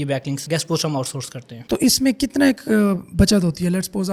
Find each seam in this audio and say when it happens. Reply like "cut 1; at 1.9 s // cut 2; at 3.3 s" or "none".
none